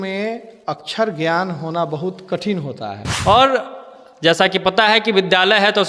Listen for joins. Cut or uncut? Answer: cut